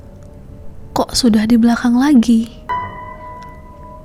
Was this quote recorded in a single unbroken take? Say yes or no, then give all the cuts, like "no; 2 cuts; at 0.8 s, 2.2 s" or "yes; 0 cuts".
yes; 0 cuts